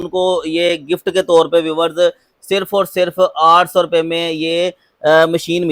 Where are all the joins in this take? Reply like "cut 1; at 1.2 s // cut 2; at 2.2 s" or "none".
none